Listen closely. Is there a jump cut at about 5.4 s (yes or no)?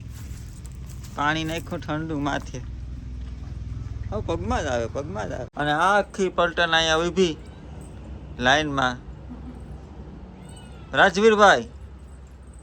yes